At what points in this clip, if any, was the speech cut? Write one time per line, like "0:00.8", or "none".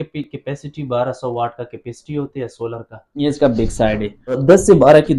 0:03.2
0:04.4